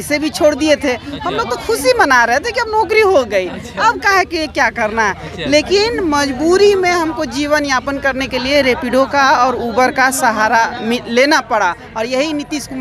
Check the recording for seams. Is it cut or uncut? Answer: uncut